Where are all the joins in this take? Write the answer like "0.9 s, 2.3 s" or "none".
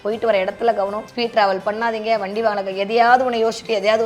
1.0 s